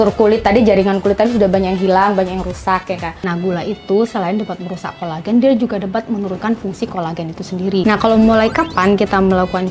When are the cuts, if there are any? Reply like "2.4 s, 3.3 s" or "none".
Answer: 3.1 s, 7.8 s